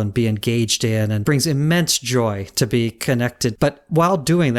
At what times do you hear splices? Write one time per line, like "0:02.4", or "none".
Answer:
0:01.2
0:03.6